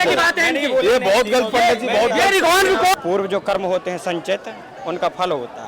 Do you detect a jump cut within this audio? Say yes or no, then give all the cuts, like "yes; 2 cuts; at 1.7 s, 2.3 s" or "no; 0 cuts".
yes; 1 cut; at 3.0 s